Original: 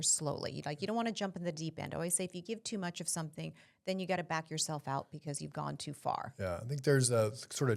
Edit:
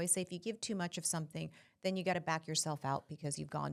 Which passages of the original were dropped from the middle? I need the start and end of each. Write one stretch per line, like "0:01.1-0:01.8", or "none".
none